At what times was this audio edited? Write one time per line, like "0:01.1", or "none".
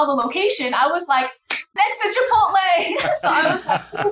0:01.7